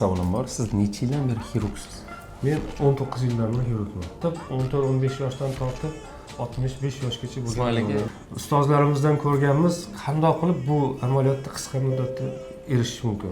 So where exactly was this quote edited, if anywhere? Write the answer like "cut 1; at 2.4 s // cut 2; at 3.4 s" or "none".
cut 1; at 4.2 s // cut 2; at 8.1 s